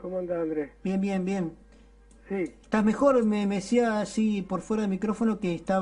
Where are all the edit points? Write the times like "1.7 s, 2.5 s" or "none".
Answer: 3.4 s